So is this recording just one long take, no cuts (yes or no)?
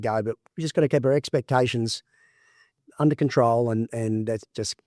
no